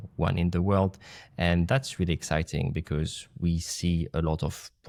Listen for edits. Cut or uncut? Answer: uncut